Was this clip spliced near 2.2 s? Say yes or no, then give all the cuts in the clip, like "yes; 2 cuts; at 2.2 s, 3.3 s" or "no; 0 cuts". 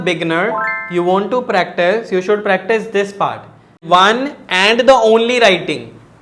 no; 1 cut; at 3.8 s